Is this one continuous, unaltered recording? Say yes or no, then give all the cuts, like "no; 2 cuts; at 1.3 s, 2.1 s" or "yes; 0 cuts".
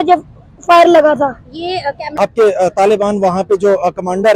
no; 1 cut; at 2.0 s